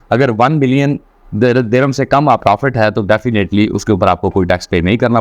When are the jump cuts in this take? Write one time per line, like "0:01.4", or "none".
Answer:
0:02.4